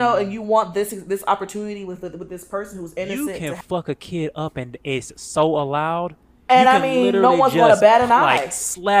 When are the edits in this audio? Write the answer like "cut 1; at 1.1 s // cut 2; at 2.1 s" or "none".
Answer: cut 1; at 3.1 s